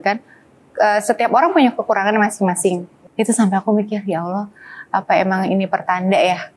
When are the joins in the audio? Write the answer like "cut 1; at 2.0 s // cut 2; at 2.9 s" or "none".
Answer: cut 1; at 2.9 s